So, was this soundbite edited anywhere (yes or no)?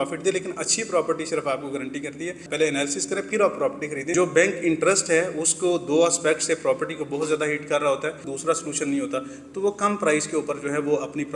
yes